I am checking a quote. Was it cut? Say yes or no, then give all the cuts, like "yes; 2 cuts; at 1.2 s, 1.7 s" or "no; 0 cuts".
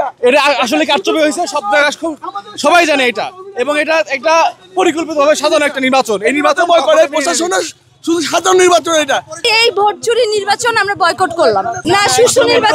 yes; 2 cuts; at 9.5 s, 11.8 s